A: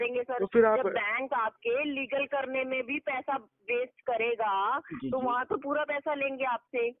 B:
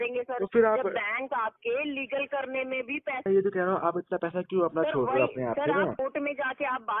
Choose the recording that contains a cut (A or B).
B